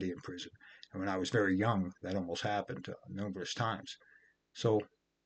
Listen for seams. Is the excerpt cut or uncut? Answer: uncut